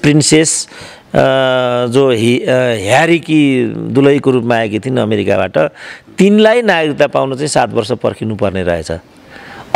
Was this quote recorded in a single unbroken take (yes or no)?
yes